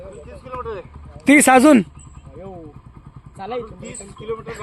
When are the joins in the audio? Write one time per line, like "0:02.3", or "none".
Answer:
0:01.3